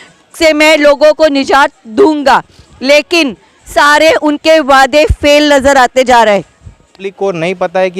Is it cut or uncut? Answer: cut